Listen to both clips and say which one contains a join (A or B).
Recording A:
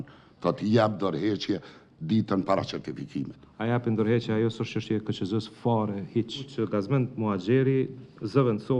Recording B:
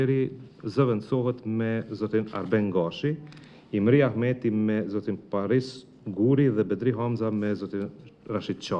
A